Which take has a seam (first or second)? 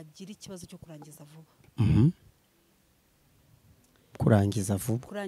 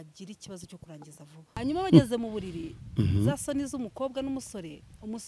second